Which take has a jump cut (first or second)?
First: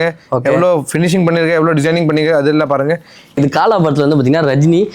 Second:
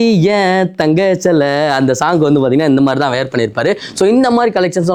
first